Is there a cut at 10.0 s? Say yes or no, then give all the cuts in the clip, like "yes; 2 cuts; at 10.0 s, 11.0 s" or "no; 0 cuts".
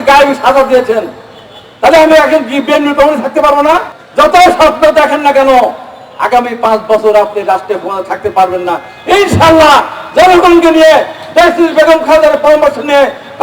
no; 1 cut; at 4.0 s